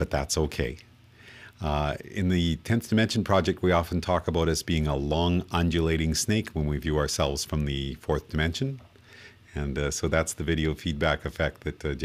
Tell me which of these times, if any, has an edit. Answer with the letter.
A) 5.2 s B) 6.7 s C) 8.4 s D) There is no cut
D